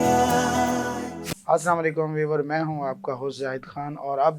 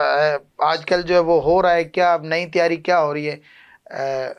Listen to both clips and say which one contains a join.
first; 1 cut; at 1.3 s

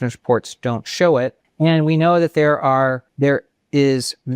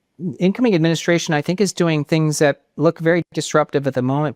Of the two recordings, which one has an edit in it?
first; 2 cuts; at 1.4 s, 3.1 s

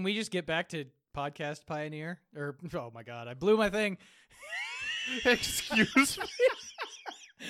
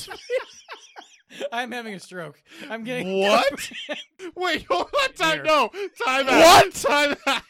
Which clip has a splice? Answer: second; 1 cut; at 4.2 s

